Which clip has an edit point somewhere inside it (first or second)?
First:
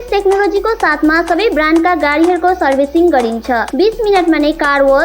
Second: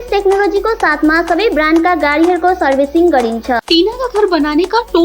second